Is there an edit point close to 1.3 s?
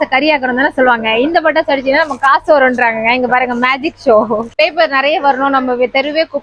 no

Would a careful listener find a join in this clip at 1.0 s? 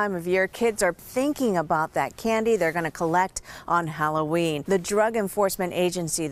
yes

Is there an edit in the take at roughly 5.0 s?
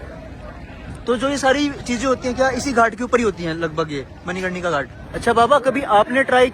yes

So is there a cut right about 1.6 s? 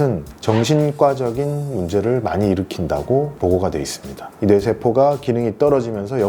no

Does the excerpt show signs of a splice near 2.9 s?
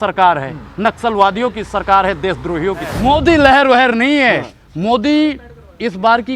yes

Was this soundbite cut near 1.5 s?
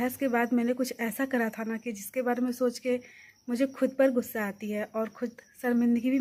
no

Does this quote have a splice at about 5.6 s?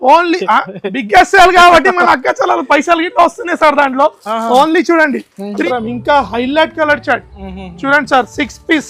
yes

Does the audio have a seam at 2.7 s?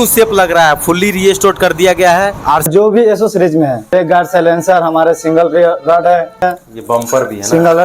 yes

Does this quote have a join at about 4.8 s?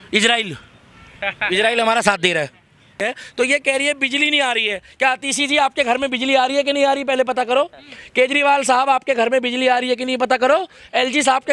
no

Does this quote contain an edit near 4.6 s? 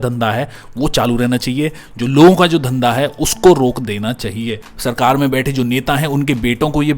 yes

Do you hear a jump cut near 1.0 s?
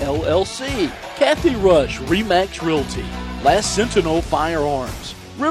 yes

